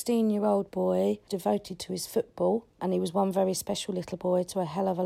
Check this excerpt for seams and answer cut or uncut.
cut